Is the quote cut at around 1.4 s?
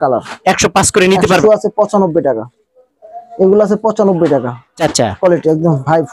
yes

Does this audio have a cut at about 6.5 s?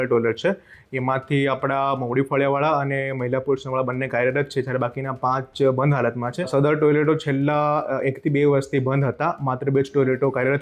yes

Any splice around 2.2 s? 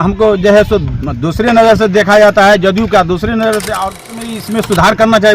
no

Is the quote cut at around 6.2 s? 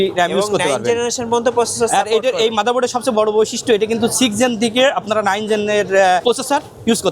yes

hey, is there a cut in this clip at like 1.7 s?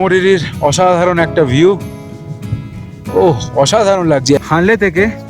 no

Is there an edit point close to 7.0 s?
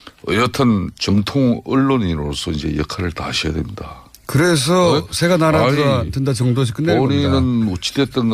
no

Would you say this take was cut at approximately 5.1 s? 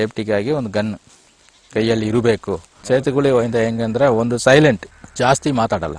no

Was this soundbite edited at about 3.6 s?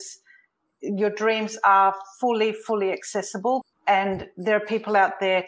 yes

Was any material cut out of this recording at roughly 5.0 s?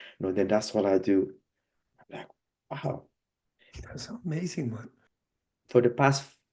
yes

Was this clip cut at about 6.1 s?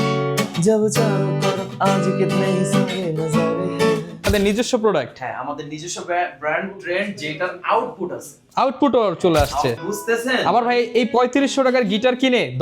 no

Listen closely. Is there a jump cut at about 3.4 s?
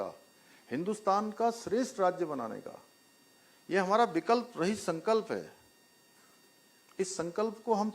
no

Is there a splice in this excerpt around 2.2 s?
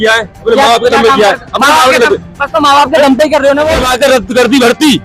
no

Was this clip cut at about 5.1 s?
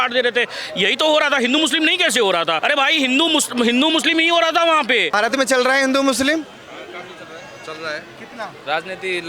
yes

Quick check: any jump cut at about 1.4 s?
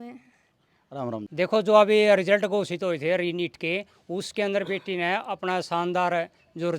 yes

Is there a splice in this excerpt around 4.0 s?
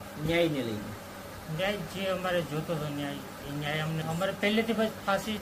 yes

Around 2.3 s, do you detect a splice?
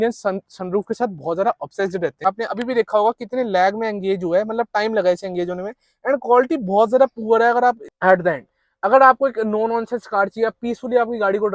yes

